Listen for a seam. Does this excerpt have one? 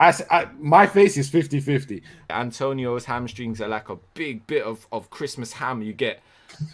yes; 1 cut; at 2.3 s

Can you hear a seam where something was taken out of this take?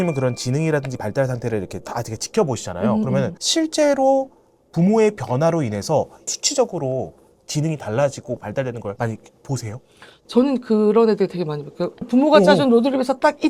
no; 0 cuts

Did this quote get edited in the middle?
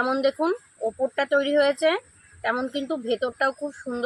no; 0 cuts

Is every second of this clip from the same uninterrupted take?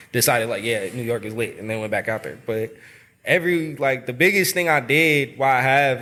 yes; 0 cuts

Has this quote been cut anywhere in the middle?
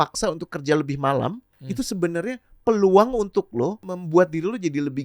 yes; 2 cuts; at 1.6 s, 3.9 s

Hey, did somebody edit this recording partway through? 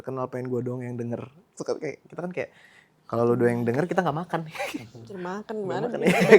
no; 0 cuts

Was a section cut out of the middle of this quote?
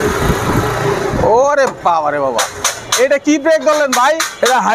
no; 0 cuts

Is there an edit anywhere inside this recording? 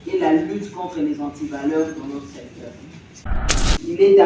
yes; 1 cut; at 3.3 s

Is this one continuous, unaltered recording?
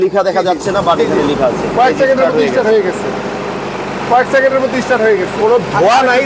yes; 0 cuts

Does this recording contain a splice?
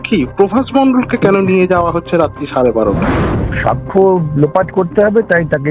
yes; 1 cut; at 3.5 s

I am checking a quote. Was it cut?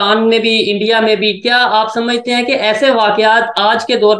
no; 0 cuts

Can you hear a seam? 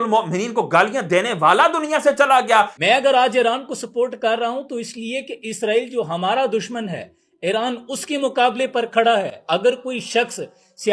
yes; 1 cut; at 2.8 s

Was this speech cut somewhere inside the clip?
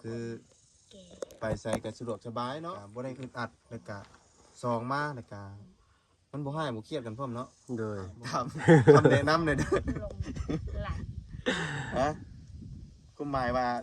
yes; 2 cuts; at 2.8 s, 8.3 s

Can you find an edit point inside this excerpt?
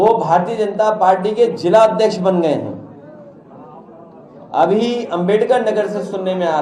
no; 0 cuts

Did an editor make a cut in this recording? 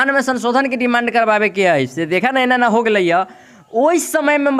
no; 0 cuts

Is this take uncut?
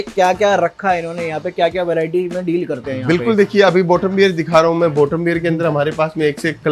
yes; 0 cuts

